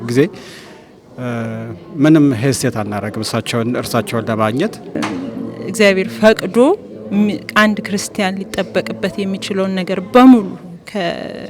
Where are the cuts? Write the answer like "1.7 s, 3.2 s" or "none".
5.0 s